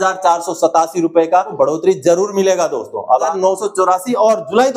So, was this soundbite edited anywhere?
yes; 2 cuts; at 1.5 s, 3.3 s

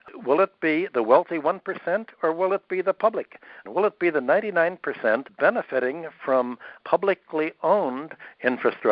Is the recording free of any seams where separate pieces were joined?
no; 2 cuts; at 3.6 s, 5.3 s

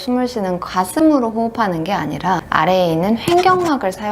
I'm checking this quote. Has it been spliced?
no; 0 cuts

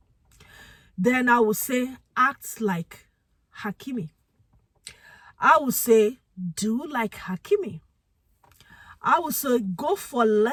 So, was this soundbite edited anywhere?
no; 0 cuts

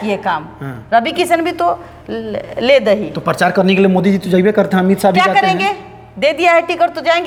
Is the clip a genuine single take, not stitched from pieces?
yes; 0 cuts

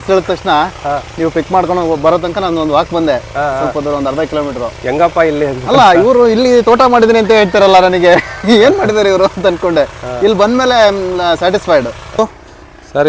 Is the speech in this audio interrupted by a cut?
yes; 1 cut; at 12.1 s

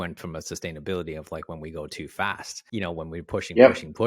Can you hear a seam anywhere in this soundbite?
yes; 1 cut; at 2.5 s

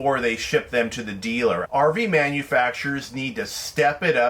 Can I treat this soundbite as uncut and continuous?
no; 1 cut; at 1.6 s

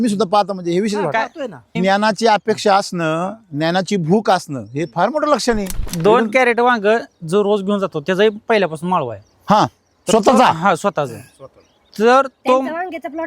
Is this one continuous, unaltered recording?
no; 2 cuts; at 1.7 s, 5.8 s

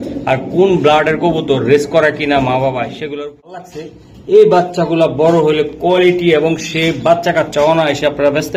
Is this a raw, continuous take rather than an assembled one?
no; 1 cut; at 3.8 s

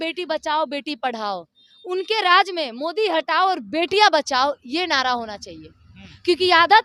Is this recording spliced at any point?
no; 0 cuts

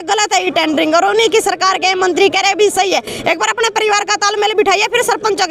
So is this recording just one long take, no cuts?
yes; 0 cuts

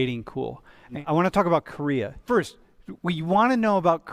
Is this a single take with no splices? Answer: no; 2 cuts; at 0.9 s, 2.2 s

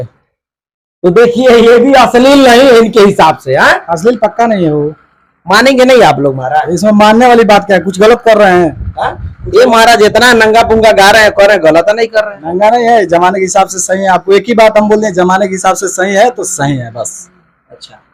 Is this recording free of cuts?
yes; 0 cuts

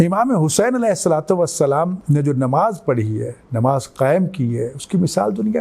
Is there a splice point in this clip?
yes; 1 cut; at 2.0 s

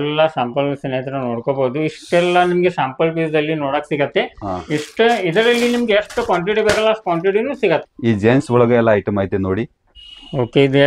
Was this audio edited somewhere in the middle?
yes; 1 cut; at 7.9 s

